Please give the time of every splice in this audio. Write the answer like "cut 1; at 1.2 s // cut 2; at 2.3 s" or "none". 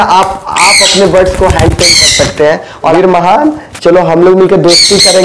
cut 1; at 2.9 s

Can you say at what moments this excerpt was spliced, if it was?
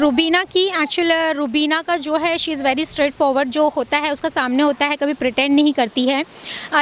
none

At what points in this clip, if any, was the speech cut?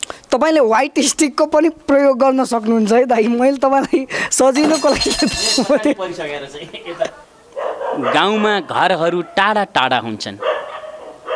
cut 1; at 7.3 s

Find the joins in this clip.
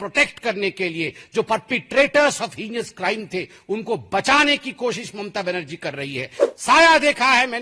cut 1; at 6.3 s

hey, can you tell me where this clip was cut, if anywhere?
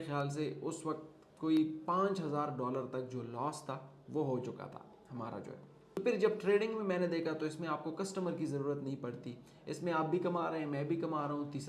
cut 1; at 6.0 s

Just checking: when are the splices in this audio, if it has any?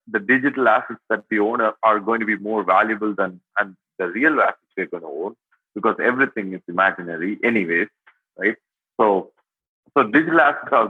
none

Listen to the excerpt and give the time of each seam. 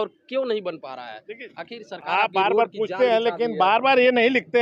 none

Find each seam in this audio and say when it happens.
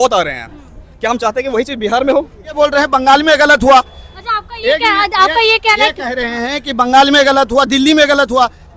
cut 1; at 2.6 s

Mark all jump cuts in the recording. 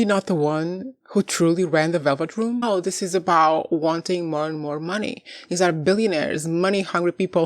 cut 1; at 2.6 s

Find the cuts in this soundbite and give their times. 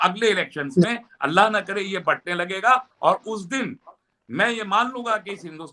none

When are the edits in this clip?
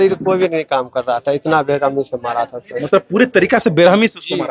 none

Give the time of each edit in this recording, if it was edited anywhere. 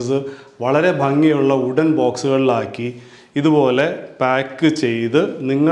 none

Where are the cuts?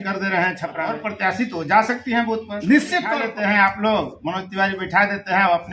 cut 1; at 0.9 s // cut 2; at 3.2 s

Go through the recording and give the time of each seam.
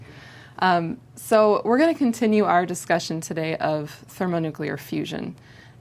cut 1; at 2.7 s

